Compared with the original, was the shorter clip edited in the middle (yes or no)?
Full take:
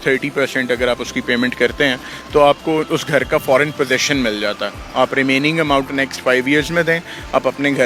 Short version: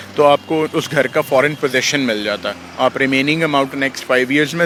no